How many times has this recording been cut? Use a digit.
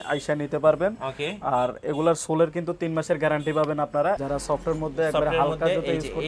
1